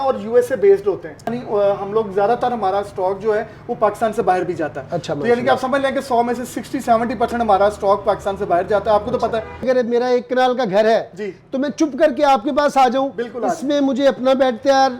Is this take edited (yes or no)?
yes